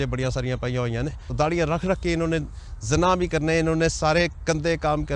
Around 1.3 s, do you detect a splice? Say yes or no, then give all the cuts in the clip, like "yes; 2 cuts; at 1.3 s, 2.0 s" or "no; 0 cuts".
yes; 1 cut; at 1.3 s